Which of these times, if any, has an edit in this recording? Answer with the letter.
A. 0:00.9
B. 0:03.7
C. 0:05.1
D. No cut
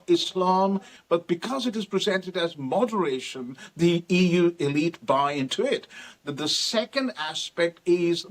A